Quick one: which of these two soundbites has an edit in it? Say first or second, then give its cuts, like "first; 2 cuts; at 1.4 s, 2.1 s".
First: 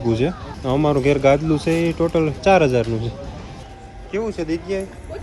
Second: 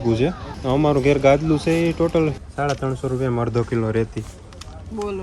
second; 1 cut; at 2.4 s